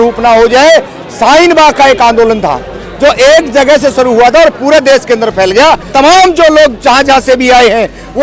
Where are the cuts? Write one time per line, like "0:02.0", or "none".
0:05.9